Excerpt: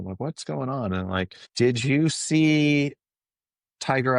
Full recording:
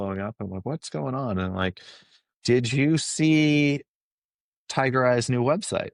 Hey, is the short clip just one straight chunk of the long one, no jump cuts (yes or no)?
no